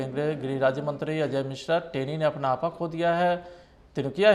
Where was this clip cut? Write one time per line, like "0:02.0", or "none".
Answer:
none

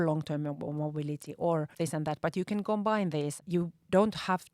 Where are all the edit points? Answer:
0:01.7
0:03.4

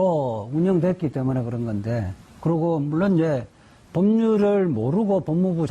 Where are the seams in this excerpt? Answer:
0:04.6

